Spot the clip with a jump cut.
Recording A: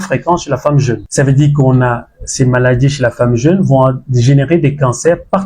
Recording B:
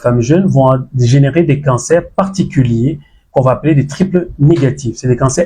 A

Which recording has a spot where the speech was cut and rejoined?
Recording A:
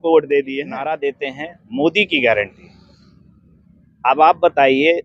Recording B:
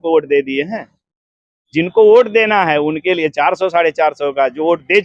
A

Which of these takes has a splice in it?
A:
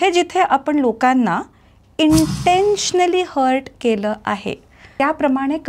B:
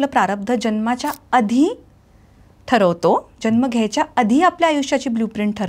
A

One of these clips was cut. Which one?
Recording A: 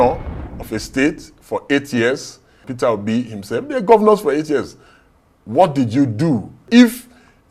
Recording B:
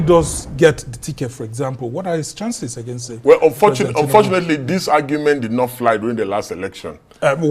A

